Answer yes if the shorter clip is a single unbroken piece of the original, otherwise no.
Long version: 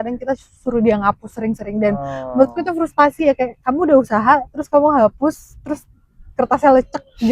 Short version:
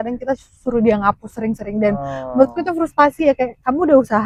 yes